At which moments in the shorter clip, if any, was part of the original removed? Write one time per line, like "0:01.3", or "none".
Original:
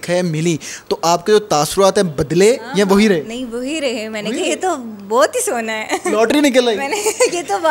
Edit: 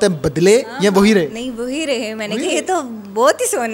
none